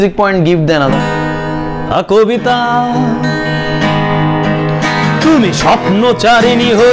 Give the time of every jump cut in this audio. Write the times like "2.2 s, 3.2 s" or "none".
0.9 s